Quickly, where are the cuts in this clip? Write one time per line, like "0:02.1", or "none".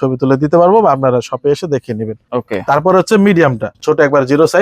0:02.2
0:03.7